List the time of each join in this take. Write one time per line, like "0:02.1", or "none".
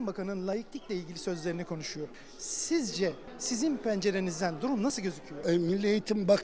0:02.2
0:03.3
0:05.3

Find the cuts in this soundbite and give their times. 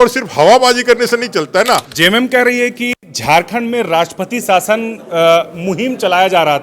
0:01.9

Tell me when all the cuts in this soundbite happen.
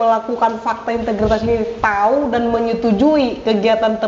none

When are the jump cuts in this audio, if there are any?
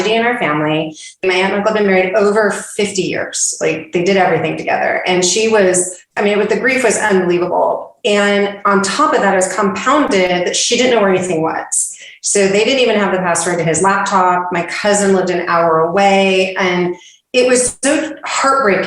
0:01.2
0:06.1

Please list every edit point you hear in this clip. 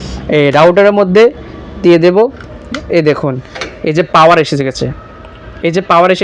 none

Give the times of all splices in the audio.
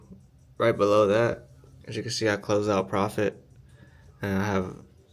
none

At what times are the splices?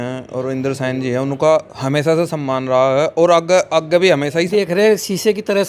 0:04.5

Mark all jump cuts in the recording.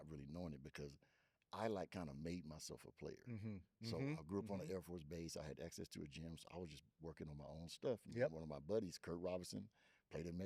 none

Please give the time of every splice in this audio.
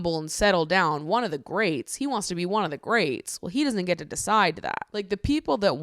0:04.8

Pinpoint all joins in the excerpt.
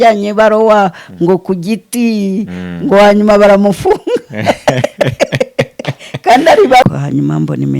0:06.8

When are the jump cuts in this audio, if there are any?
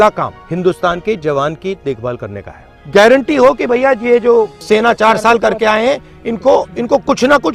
none

